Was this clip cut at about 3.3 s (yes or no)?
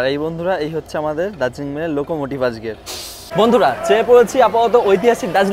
yes